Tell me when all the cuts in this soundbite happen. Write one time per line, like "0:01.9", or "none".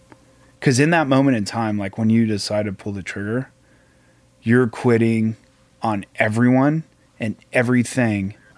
none